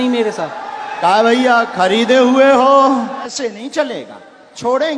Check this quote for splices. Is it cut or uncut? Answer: cut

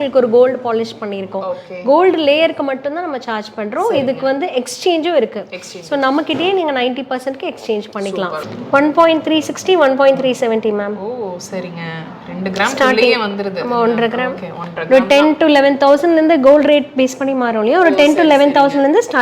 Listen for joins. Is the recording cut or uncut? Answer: cut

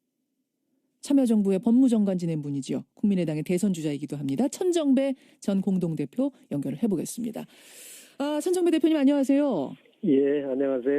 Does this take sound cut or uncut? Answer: cut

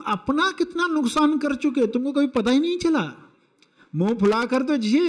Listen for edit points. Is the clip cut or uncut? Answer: uncut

